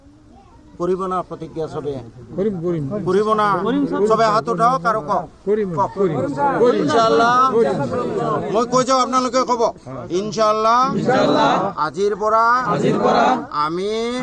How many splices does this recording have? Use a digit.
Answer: 0